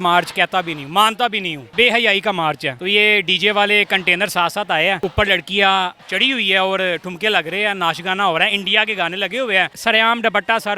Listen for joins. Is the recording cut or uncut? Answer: cut